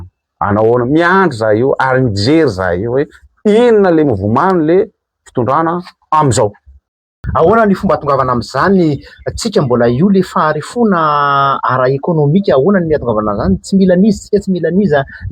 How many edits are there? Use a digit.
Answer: 1